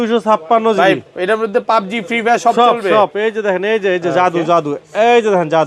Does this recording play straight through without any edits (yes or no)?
yes